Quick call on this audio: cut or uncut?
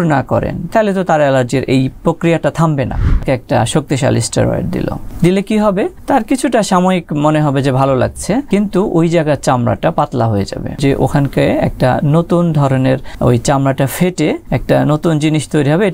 cut